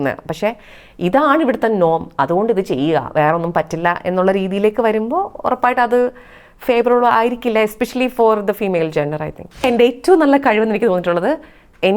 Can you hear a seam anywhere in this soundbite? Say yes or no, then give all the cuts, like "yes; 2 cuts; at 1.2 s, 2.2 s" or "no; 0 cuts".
yes; 1 cut; at 9.6 s